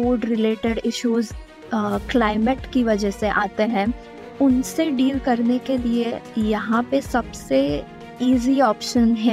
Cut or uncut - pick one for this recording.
uncut